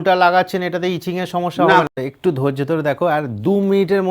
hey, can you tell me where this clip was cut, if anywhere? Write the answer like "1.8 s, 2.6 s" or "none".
1.9 s